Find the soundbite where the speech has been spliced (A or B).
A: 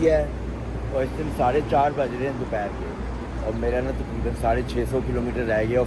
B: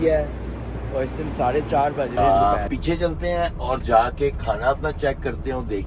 B